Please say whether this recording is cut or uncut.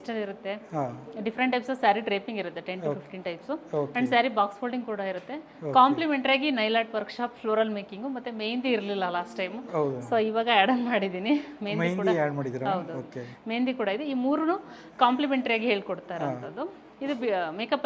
uncut